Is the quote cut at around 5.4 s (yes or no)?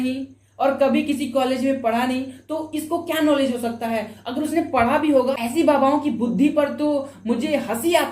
yes